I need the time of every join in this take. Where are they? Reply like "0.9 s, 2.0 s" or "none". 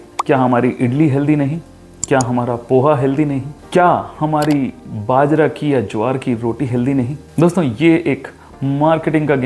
none